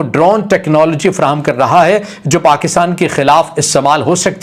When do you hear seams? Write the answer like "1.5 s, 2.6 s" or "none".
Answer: none